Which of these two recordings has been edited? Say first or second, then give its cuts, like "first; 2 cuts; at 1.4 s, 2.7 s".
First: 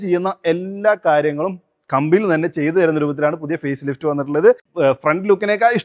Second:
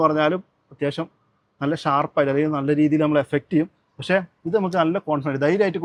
first; 1 cut; at 4.7 s